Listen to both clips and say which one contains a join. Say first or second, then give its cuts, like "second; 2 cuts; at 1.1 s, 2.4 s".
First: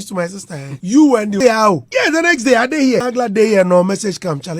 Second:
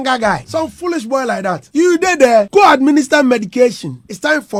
first; 2 cuts; at 1.4 s, 3.0 s